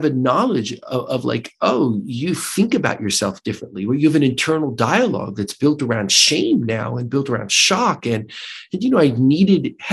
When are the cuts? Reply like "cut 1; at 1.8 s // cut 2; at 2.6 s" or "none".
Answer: none